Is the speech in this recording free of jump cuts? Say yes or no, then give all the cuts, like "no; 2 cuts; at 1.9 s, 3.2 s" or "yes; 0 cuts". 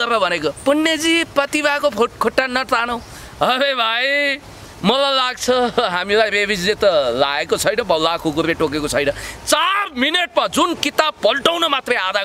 yes; 0 cuts